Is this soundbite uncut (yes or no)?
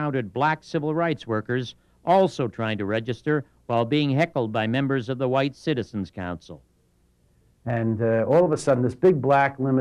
no